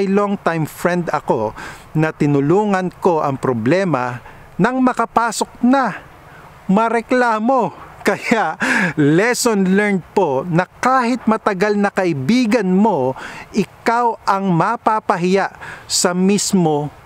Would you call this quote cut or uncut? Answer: uncut